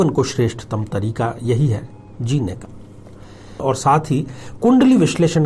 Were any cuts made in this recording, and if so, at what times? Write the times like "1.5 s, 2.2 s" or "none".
3.6 s

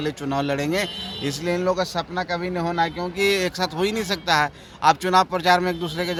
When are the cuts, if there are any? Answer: none

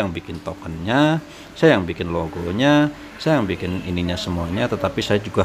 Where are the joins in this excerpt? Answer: none

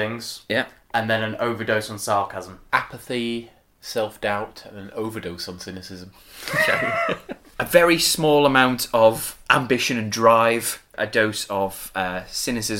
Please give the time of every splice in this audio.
2.6 s, 7.4 s, 9.3 s, 11.0 s

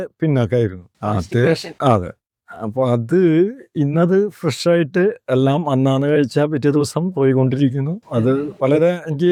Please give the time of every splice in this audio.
none

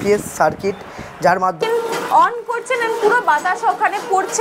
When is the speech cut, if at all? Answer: 1.6 s

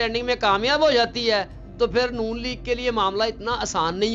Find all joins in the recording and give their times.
none

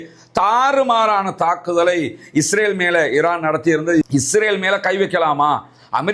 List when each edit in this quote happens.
4.0 s

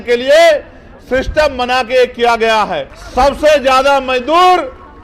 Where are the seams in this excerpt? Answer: 3.0 s

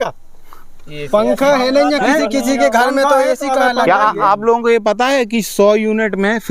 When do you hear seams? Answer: none

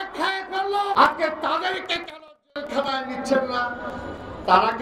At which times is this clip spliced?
0.9 s

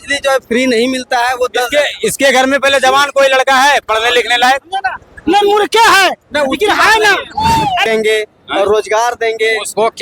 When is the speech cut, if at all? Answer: 7.8 s

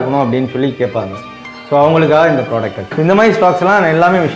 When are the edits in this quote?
2.8 s

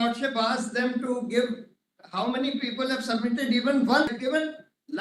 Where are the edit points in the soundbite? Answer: 4.1 s

